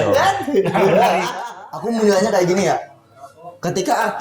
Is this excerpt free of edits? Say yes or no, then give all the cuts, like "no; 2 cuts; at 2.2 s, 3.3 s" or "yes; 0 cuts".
no; 1 cut; at 1.3 s